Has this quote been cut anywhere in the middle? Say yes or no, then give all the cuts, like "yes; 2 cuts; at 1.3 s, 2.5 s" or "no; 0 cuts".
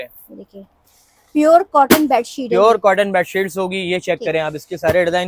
no; 0 cuts